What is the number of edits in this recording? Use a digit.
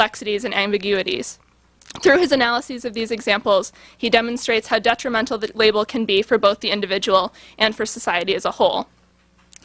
1